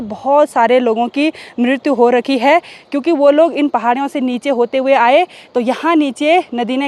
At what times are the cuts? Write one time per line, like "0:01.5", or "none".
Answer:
none

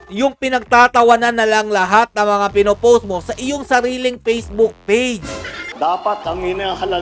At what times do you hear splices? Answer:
0:05.7

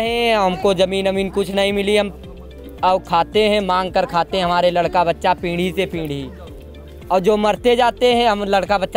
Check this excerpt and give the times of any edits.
none

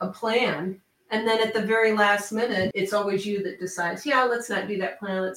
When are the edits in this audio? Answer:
0:01.0
0:02.7

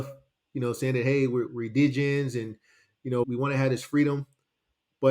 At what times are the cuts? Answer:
0:01.5
0:03.2

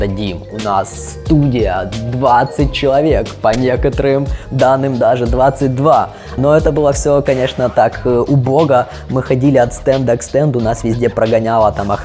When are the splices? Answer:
none

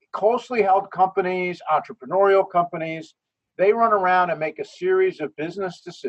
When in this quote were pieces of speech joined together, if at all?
none

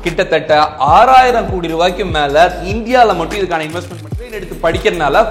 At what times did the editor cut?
0:04.3

